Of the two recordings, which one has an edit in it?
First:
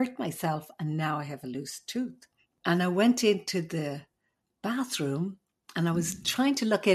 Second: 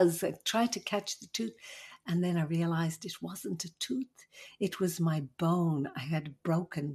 first; 1 cut; at 2.5 s

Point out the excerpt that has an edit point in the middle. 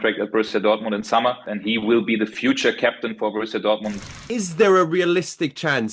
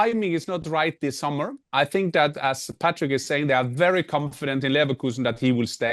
first; 2 cuts; at 1.5 s, 4.0 s

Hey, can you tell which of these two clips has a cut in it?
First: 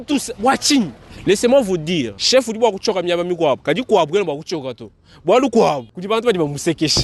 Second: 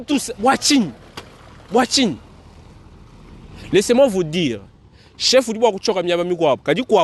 first; 3 cuts; at 1.0 s, 2.2 s, 5.9 s

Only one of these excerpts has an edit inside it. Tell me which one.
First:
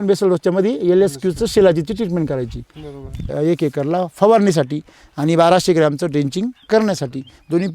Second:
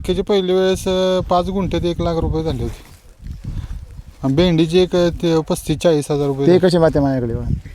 first; 1 cut; at 3.3 s

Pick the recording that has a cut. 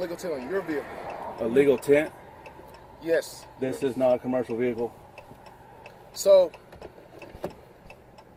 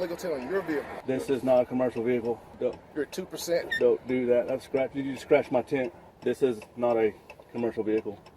second; 3 cuts; at 0.9 s, 2.5 s, 6.0 s

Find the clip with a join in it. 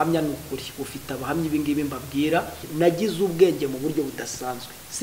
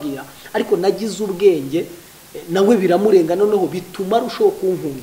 first; 1 cut; at 2.6 s

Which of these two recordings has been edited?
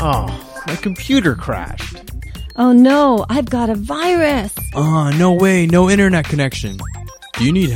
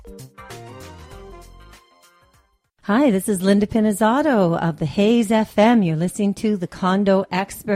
second; 1 cut; at 2.8 s

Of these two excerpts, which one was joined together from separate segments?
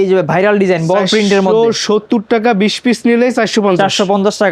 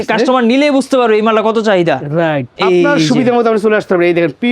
second; 1 cut; at 2.5 s

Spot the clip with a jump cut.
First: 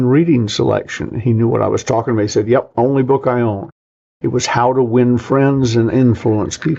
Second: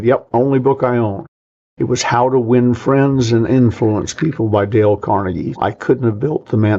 second; 1 cut; at 5.5 s

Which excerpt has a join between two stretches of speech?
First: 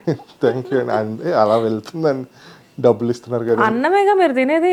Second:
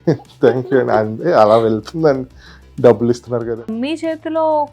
second; 1 cut; at 3.5 s

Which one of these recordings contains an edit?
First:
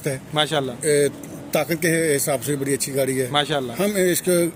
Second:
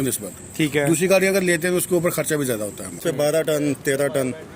second; 1 cut; at 3.0 s

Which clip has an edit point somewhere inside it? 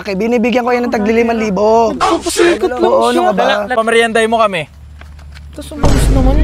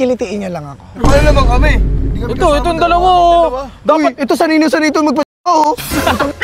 first; 1 cut; at 3.7 s

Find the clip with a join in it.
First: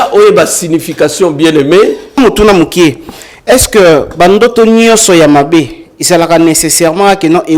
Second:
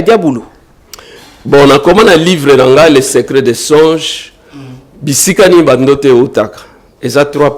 first; 1 cut; at 2.2 s

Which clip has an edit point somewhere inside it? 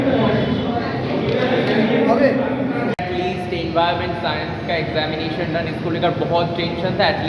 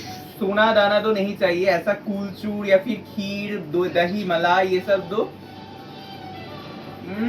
first; 1 cut; at 3.1 s

